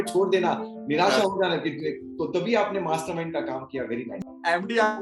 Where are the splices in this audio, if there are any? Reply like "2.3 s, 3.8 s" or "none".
4.1 s